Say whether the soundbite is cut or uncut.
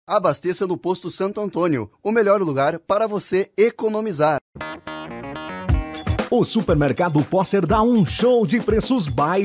cut